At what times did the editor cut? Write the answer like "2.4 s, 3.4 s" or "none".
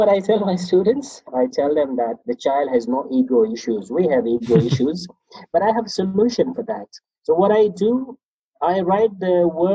1.2 s, 2.3 s